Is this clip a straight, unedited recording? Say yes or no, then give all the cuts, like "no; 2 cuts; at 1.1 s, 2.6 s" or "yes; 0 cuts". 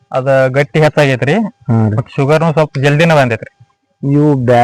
yes; 0 cuts